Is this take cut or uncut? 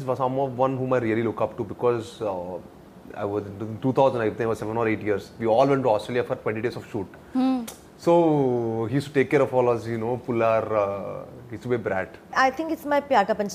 cut